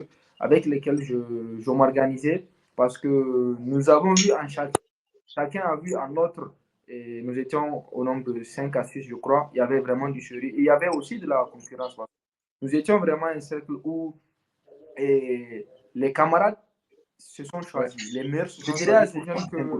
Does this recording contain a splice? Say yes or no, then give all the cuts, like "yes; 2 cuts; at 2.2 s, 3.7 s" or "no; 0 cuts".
yes; 1 cut; at 18.6 s